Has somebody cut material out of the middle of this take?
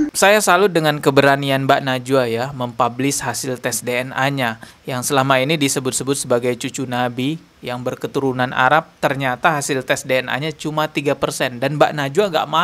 no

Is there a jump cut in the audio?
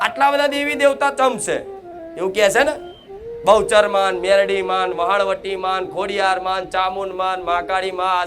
no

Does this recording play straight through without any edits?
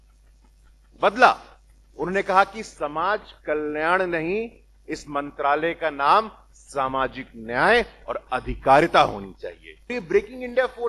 no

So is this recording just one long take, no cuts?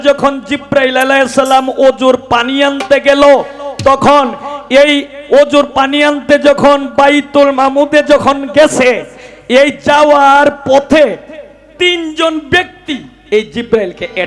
yes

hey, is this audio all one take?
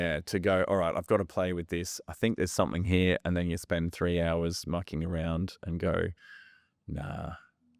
yes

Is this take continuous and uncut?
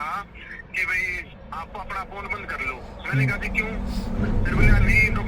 no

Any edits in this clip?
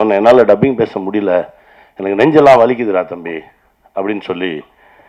no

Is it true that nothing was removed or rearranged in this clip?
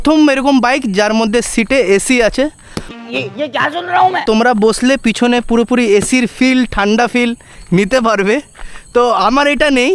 yes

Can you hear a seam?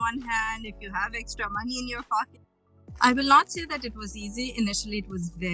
yes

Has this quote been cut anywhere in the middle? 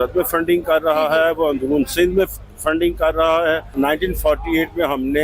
yes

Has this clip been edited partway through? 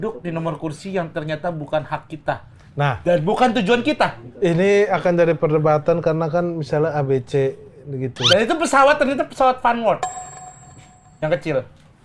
no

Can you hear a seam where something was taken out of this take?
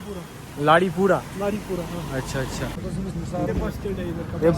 yes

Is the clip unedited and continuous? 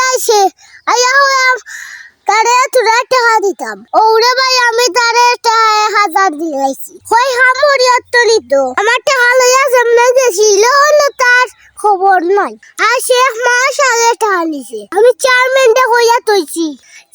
no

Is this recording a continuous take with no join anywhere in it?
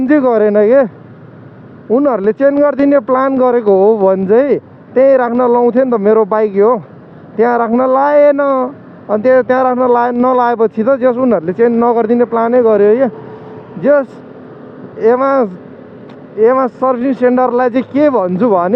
yes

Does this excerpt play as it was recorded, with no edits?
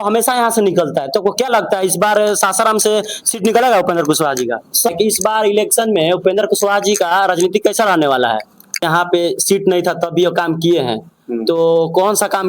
no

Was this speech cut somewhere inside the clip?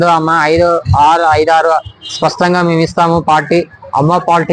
no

